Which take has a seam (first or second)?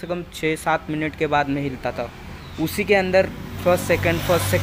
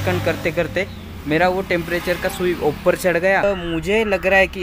second